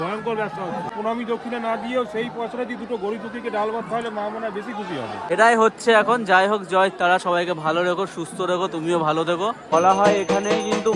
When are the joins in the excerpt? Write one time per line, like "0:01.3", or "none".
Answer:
0:00.9
0:05.3
0:09.7